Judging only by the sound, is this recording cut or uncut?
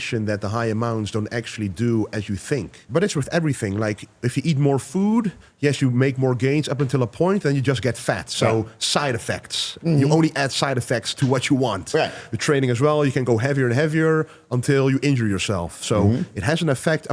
cut